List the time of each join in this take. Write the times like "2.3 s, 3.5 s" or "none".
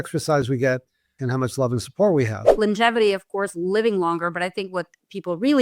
1.2 s, 2.6 s

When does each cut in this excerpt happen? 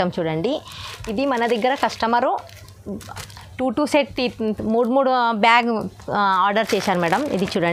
none

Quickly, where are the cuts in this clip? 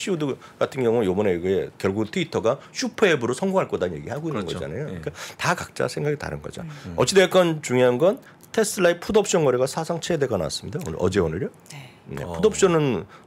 1.7 s

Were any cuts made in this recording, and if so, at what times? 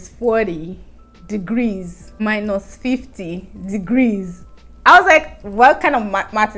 2.0 s

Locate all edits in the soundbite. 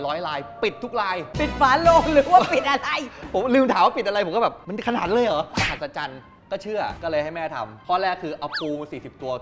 none

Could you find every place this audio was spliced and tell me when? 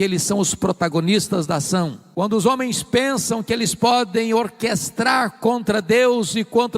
2.0 s

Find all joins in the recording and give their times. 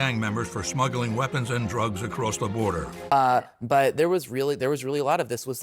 3.1 s

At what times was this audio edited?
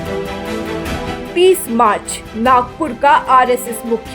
1.0 s

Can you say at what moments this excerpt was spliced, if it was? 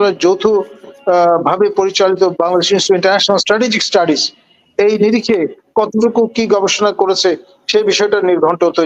none

